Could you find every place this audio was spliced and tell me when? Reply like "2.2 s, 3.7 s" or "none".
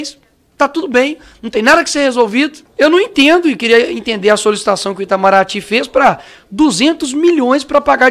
2.6 s